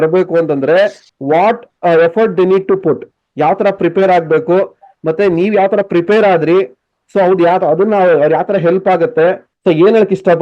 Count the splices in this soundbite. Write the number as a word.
two